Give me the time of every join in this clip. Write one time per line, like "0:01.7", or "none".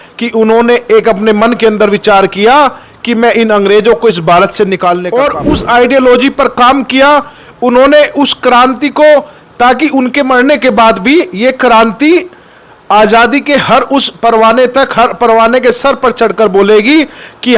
0:05.1